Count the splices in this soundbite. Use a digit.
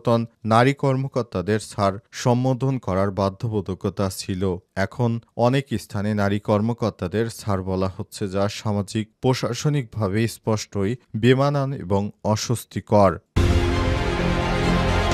1